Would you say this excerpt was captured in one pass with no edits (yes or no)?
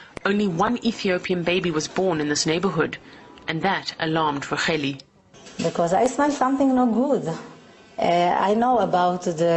no